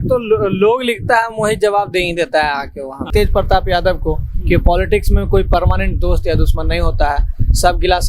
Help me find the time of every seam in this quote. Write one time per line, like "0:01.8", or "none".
0:03.1